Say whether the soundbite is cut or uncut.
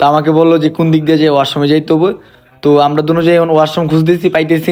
uncut